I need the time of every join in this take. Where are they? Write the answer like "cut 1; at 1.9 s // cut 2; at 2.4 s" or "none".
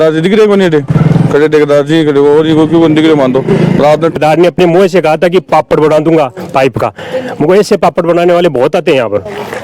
cut 1; at 4.2 s